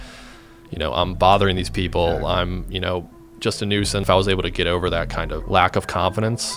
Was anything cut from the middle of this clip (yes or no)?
yes